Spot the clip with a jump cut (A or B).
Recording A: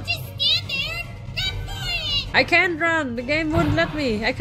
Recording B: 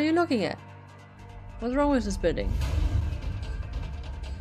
A